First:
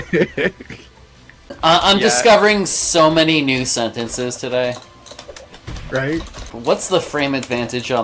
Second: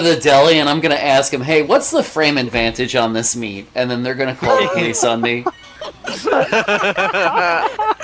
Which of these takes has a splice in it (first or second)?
first